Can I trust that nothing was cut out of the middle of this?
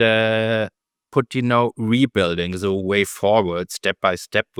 yes; 0 cuts

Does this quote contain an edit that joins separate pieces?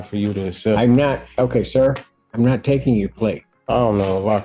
yes; 1 cut; at 3.5 s

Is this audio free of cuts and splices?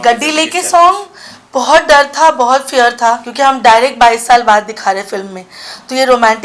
no; 1 cut; at 3.3 s

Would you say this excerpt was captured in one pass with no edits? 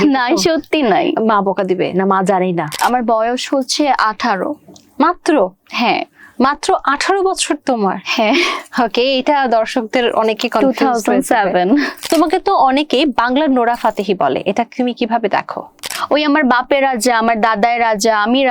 no; 3 cuts; at 2.7 s, 12.0 s, 15.9 s

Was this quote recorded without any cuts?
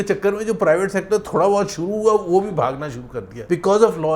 yes; 0 cuts

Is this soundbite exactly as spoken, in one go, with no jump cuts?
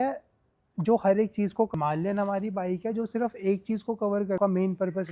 no; 2 cuts; at 1.7 s, 4.4 s

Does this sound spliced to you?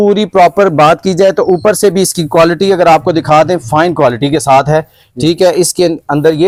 no; 0 cuts

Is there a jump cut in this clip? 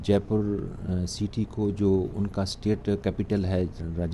no; 0 cuts

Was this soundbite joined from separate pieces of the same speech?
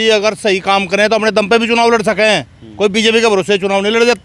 no; 0 cuts

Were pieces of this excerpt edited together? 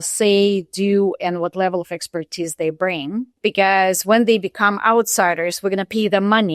yes; 1 cut; at 3.3 s

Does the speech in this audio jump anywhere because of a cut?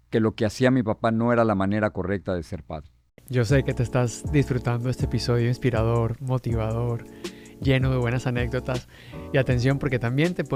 no; 0 cuts

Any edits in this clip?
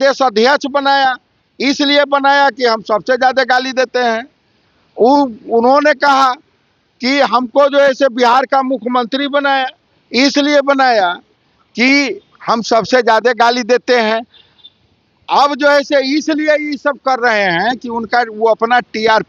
no; 0 cuts

